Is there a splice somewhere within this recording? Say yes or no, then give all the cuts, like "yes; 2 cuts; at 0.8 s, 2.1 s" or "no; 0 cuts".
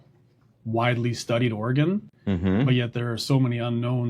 no; 0 cuts